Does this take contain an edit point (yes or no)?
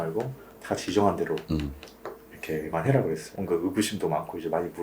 yes